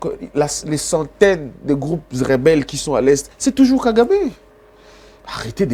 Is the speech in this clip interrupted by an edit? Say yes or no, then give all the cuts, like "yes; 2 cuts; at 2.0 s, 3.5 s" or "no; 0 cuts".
no; 0 cuts